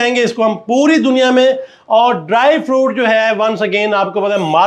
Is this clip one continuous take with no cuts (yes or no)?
yes